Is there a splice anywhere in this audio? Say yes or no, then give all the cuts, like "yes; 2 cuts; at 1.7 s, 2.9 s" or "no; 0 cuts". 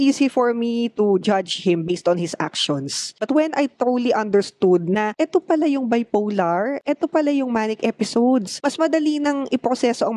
yes; 2 cuts; at 3.1 s, 8.6 s